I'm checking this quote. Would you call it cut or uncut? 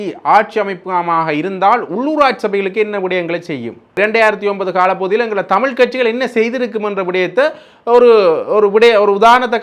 cut